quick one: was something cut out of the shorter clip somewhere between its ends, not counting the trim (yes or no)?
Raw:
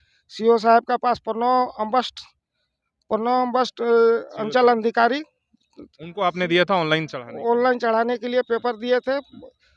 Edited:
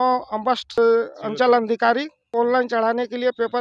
yes